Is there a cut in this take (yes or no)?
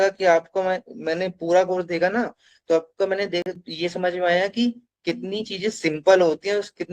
no